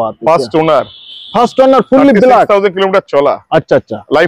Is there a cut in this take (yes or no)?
no